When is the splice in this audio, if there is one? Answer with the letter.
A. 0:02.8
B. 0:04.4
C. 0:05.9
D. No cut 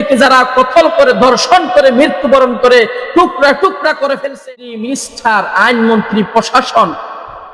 B